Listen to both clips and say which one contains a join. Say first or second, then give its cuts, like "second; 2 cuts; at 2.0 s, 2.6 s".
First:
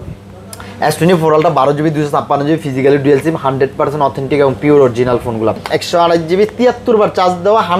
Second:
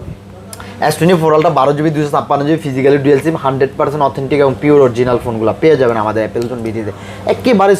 first; 1 cut; at 5.6 s